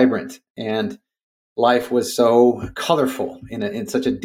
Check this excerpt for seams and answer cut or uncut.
cut